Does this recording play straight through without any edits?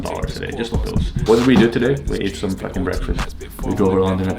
no; 1 cut; at 1.2 s

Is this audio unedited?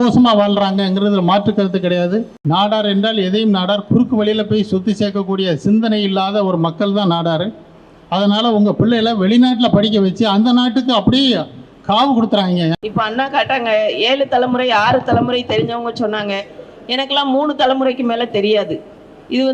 no; 2 cuts; at 2.3 s, 12.7 s

